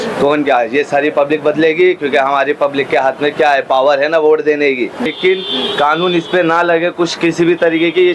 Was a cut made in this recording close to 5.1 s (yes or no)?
yes